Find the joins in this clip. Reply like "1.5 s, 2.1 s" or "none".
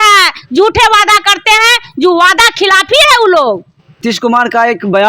4.0 s